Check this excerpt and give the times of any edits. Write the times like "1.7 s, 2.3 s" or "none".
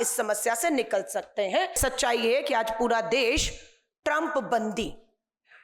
1.8 s